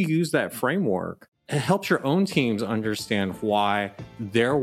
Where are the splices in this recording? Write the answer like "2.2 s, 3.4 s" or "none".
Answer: none